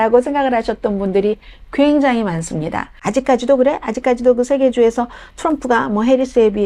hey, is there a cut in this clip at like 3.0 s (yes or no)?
yes